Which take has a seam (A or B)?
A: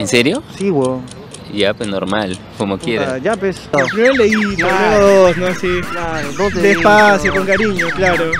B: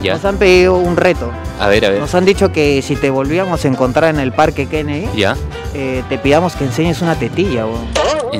A